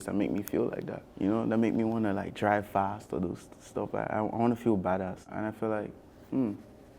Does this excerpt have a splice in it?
yes; 2 cuts; at 1.0 s, 5.3 s

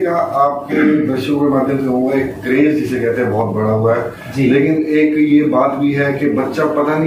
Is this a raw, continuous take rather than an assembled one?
yes; 0 cuts

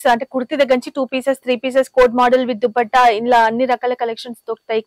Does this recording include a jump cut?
no; 0 cuts

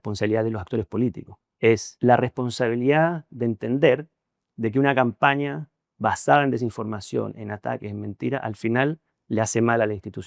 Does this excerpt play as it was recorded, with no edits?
no; 1 cut; at 1.9 s

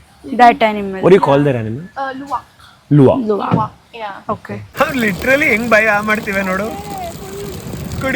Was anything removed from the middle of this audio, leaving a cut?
yes; 1 cut; at 4.6 s

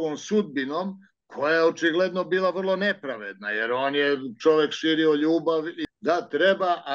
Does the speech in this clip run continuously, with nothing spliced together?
no; 1 cut; at 5.8 s

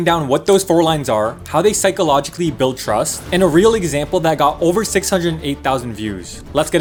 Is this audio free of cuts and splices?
yes; 0 cuts

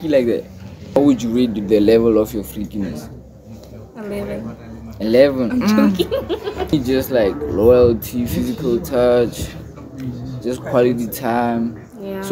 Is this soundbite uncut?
no; 2 cuts; at 1.0 s, 6.7 s

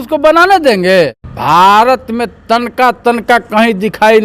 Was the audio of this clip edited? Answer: yes; 1 cut; at 1.3 s

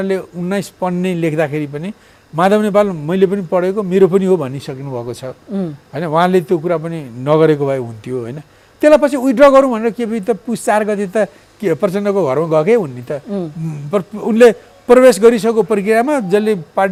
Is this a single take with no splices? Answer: yes; 0 cuts

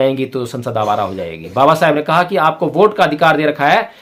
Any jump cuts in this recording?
no; 0 cuts

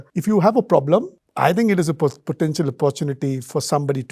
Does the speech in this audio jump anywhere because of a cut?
no; 0 cuts

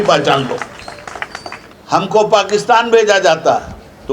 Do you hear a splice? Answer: yes; 1 cut; at 1.7 s

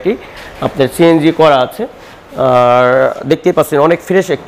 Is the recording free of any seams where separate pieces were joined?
yes; 0 cuts

